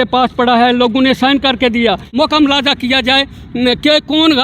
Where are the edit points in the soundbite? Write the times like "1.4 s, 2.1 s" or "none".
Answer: 2.0 s